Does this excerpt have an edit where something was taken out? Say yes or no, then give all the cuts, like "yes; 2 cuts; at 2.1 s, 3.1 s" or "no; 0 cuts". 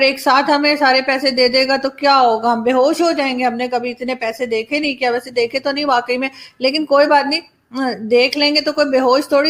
no; 0 cuts